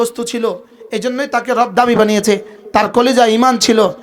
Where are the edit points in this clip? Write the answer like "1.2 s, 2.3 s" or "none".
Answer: none